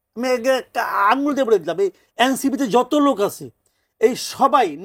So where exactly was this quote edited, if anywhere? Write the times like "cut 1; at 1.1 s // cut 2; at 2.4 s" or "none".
none